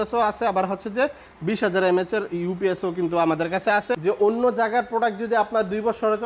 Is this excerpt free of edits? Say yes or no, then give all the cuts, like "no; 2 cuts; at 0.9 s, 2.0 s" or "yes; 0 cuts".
no; 1 cut; at 4.0 s